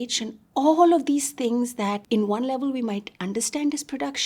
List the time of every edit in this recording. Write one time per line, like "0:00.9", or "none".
0:02.0